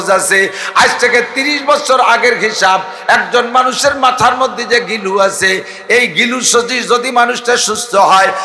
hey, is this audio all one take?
yes; 0 cuts

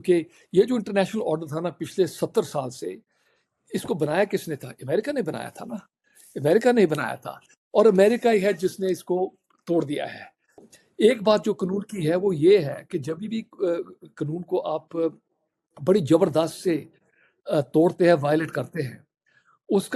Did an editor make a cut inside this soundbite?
yes; 1 cut; at 10.7 s

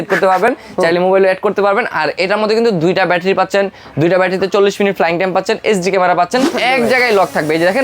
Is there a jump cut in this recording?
yes; 1 cut; at 6.5 s

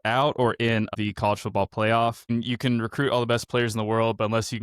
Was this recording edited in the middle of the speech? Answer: yes; 2 cuts; at 0.9 s, 2.3 s

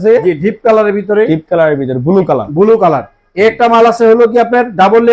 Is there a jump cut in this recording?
no; 0 cuts

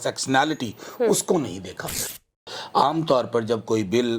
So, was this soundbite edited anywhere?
yes; 1 cut; at 2.3 s

